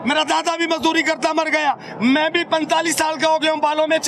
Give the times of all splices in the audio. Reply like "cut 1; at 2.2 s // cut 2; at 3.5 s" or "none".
none